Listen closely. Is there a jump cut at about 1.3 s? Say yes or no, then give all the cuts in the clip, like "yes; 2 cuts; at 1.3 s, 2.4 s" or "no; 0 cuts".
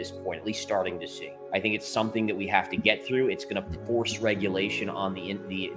yes; 1 cut; at 1.3 s